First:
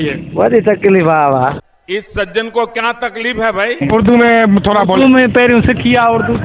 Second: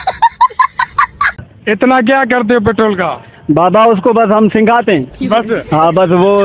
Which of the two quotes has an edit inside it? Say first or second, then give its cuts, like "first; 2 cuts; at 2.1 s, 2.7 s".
first; 1 cut; at 3.8 s